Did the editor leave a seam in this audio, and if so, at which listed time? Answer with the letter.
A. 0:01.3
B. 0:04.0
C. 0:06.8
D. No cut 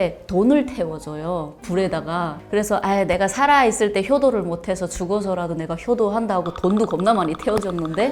D